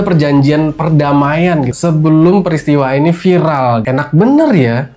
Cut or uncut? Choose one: cut